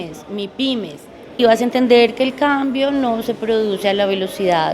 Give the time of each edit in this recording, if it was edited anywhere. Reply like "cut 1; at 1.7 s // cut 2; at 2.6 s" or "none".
cut 1; at 1.4 s